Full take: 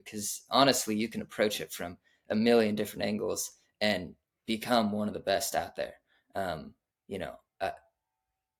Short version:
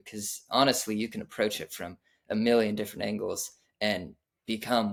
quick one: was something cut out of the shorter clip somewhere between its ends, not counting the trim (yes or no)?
no